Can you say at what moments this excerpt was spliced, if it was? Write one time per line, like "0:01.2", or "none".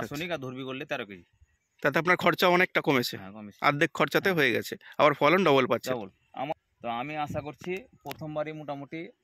0:06.5